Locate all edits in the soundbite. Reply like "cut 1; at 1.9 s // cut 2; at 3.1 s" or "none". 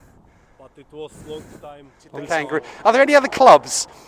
cut 1; at 2.1 s